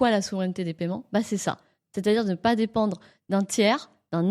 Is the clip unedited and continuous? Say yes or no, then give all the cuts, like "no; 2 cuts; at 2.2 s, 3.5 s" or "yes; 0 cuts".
yes; 0 cuts